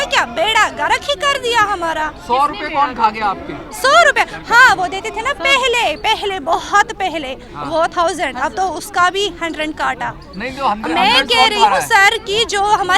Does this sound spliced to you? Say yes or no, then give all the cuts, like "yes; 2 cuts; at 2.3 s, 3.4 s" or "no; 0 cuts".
no; 0 cuts